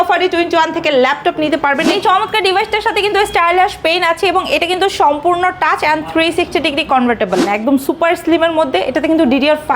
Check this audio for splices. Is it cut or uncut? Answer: cut